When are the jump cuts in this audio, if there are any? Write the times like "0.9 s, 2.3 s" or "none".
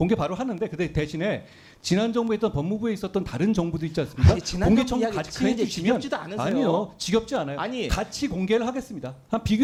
none